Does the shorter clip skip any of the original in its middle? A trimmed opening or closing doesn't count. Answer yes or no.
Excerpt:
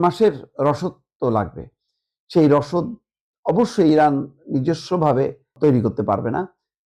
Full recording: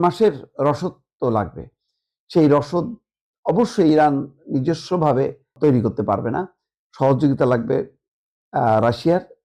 no